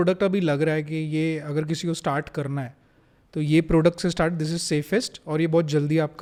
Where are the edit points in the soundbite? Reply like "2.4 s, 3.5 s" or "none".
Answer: none